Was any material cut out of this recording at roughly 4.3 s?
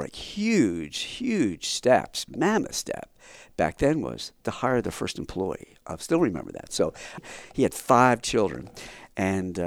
no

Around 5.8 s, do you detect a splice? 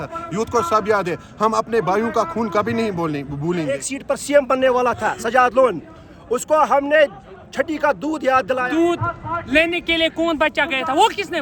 no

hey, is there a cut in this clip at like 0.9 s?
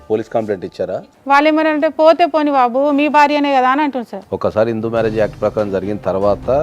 yes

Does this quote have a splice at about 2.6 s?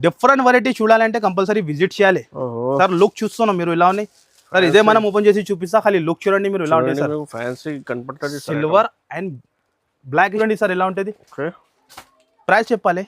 no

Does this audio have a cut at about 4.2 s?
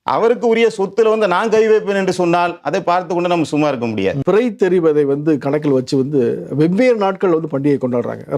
yes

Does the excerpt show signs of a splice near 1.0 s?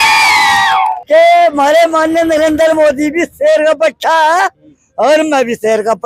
yes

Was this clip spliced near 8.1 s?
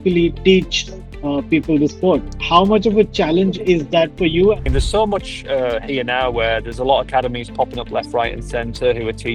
no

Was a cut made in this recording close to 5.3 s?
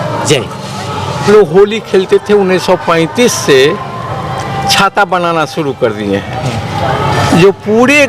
no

